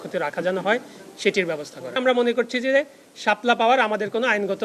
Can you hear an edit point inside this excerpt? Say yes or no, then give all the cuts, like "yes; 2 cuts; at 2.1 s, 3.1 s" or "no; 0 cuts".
yes; 1 cut; at 2.0 s